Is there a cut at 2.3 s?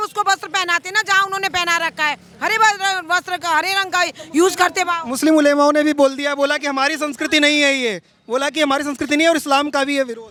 no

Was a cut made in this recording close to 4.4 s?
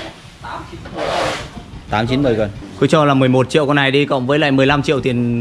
no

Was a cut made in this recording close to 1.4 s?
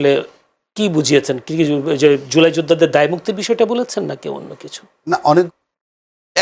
no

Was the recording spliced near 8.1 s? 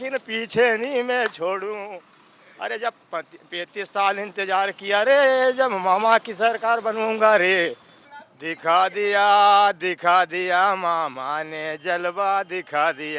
yes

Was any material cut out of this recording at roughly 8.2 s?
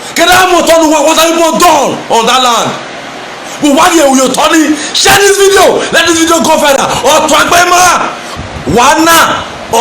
yes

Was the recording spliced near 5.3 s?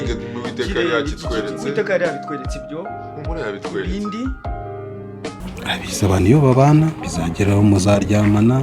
yes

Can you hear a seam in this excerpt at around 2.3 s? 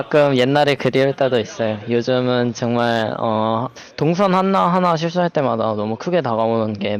no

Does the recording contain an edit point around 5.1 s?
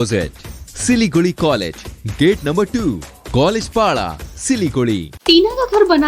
yes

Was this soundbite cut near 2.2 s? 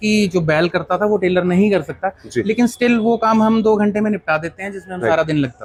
no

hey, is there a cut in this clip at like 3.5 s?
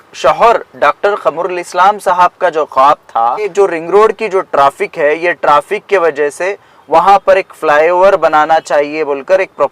yes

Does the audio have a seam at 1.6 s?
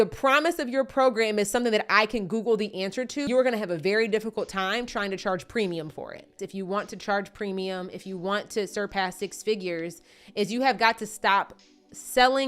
no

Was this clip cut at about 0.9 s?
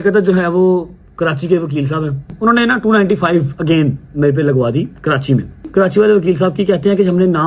no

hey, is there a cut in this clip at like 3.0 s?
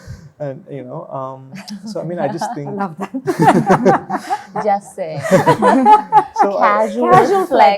no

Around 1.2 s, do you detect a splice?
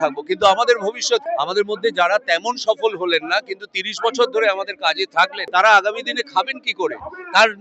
yes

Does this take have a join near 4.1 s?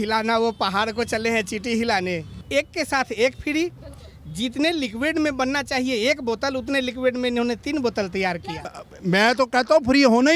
no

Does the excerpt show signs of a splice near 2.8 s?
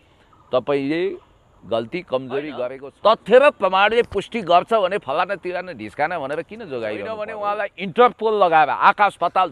yes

